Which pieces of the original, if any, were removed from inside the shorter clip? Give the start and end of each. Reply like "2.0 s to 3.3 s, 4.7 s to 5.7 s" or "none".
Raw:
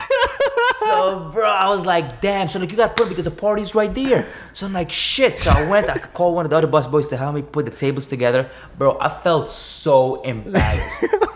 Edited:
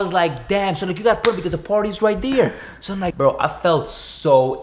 4.8 s to 8.7 s